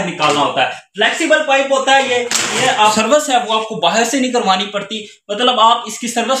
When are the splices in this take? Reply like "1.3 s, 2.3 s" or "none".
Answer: 2.9 s